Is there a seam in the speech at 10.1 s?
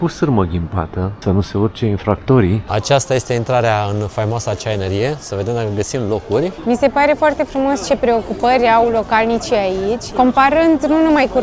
yes; 4 cuts; at 1.2 s, 2.6 s, 6.6 s, 10.1 s

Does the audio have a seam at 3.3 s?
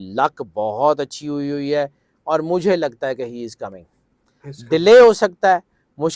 no; 0 cuts

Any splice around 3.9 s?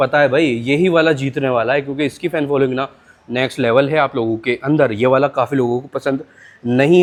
no; 0 cuts

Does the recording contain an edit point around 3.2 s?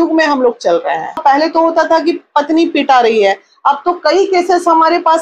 no; 1 cut; at 1.2 s

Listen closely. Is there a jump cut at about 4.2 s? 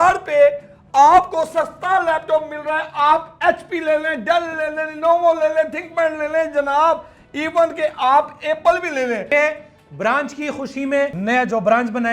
no; 2 cuts; at 9.3 s, 11.2 s

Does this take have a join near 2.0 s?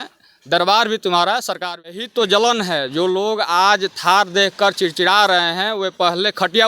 yes; 1 cut; at 2.0 s

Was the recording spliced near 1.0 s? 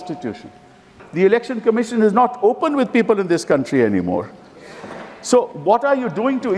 yes; 1 cut; at 1.0 s

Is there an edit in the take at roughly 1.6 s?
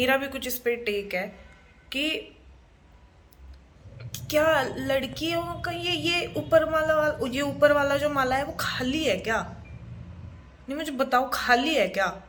no; 0 cuts

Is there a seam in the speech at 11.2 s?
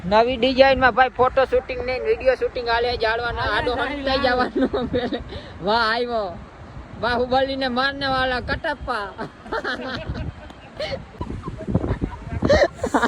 yes; 1 cut; at 11.2 s

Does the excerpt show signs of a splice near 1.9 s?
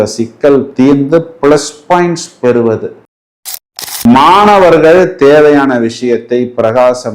no; 1 cut; at 3.4 s

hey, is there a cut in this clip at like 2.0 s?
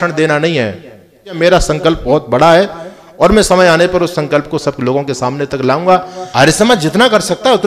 yes; 3 cuts; at 1.3 s, 2.0 s, 6.2 s

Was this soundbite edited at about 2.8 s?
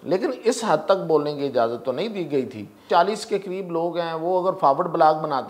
yes; 1 cut; at 2.8 s

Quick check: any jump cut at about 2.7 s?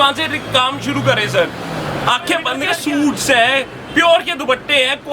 yes; 1 cut; at 2.7 s

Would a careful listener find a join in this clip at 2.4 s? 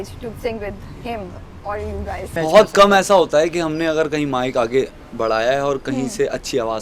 yes; 1 cut; at 2.4 s

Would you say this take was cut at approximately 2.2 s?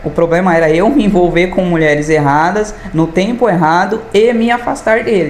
no; 0 cuts

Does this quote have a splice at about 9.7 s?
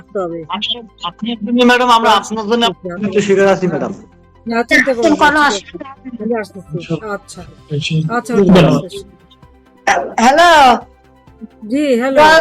yes; 1 cut; at 9.7 s

